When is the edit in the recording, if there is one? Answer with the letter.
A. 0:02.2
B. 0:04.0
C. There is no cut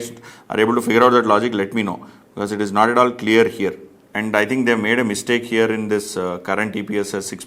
B